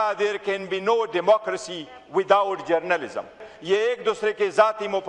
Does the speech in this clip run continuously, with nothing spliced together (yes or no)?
no